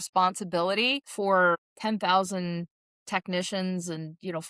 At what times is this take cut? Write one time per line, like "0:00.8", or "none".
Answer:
0:01.0
0:01.7